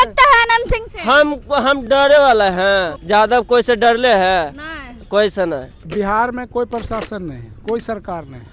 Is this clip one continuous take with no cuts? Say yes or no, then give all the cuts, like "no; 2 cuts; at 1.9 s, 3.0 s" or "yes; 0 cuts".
no; 2 cuts; at 3.0 s, 5.8 s